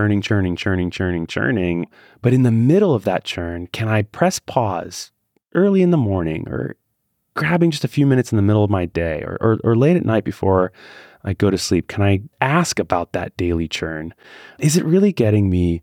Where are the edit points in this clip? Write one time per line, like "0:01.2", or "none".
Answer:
0:01.9